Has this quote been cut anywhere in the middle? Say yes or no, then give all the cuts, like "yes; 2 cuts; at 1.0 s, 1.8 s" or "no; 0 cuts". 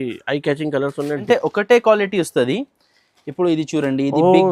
yes; 1 cut; at 1.2 s